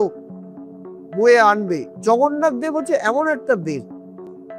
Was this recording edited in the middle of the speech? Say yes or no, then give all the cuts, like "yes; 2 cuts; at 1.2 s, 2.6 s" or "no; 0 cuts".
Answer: yes; 1 cut; at 1.9 s